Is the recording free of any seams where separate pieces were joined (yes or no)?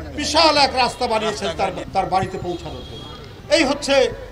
no